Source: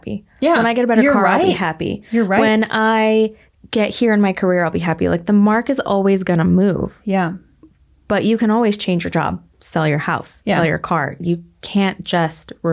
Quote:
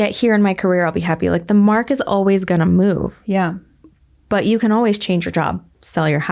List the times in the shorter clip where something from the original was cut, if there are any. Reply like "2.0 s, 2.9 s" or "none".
none